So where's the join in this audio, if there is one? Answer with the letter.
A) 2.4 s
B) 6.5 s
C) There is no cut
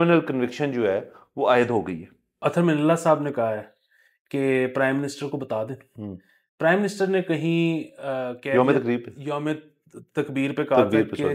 A